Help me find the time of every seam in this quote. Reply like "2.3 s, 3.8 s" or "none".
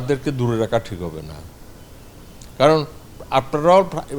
none